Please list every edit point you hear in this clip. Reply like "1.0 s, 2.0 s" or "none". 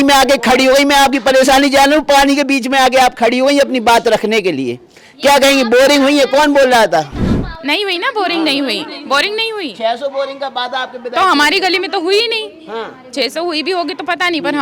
none

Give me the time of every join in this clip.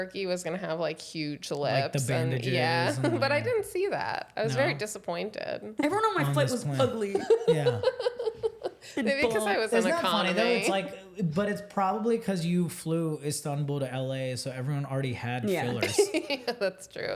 5.7 s

